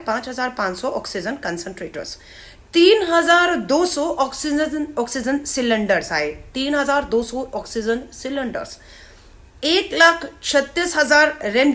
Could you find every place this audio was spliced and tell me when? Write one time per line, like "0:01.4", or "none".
none